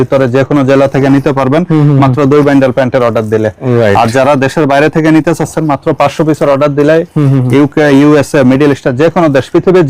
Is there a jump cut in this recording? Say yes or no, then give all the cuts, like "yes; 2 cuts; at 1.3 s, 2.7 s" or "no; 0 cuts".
no; 0 cuts